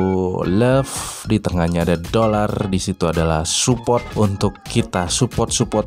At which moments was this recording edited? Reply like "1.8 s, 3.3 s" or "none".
4.1 s

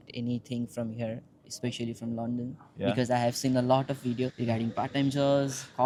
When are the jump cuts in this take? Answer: none

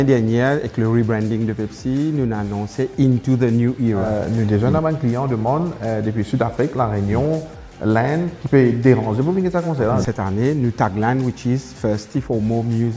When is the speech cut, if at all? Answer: 4.1 s, 10.0 s

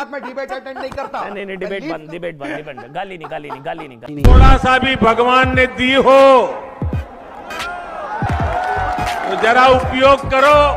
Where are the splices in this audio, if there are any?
none

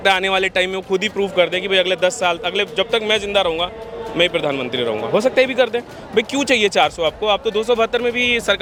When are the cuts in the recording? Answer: none

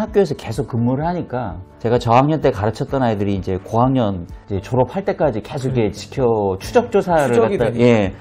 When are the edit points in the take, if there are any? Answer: none

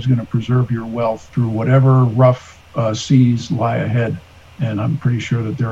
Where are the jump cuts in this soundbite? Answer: 1.3 s

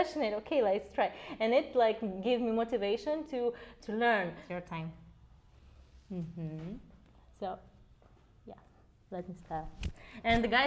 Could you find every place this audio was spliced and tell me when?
4.4 s

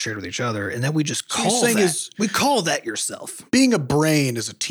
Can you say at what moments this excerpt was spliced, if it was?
3.5 s

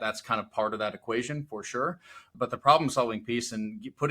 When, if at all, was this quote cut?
2.3 s

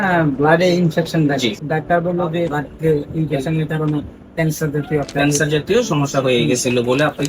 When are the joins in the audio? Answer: 1.6 s, 2.6 s

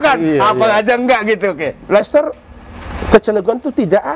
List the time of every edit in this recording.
2.0 s

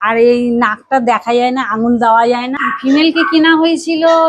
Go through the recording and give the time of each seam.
2.6 s

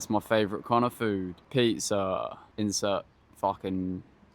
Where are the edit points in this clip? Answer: 1.4 s, 2.4 s, 3.2 s

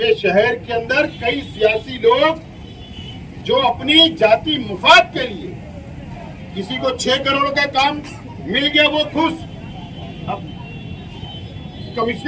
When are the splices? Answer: none

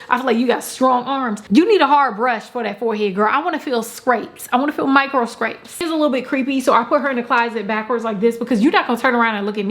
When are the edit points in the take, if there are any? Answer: 1.3 s, 5.8 s

